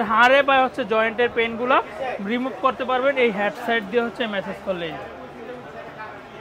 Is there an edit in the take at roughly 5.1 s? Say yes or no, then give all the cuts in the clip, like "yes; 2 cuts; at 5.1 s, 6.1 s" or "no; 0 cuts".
no; 0 cuts